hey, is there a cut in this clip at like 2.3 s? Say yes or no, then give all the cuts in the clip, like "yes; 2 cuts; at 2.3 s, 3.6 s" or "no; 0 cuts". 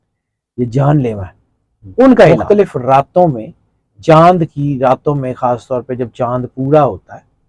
yes; 1 cut; at 2.3 s